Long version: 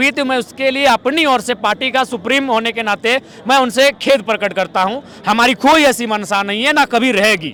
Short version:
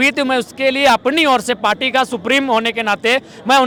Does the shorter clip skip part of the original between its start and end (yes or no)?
no